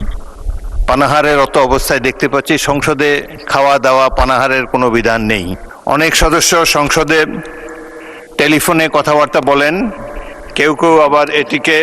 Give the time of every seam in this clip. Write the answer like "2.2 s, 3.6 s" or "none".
5.6 s